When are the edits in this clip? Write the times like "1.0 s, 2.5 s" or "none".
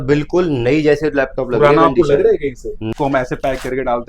2.9 s